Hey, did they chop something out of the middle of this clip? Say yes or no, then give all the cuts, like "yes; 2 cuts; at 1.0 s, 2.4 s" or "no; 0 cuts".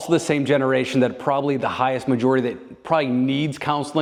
no; 0 cuts